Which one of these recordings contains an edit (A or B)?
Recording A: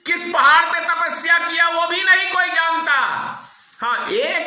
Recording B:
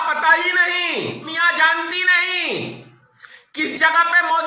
B